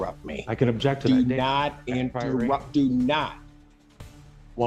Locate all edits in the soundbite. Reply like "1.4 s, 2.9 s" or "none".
none